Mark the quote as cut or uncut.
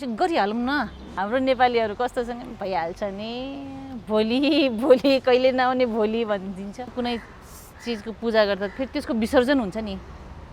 cut